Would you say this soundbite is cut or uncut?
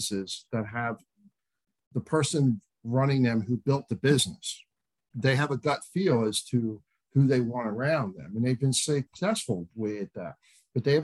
uncut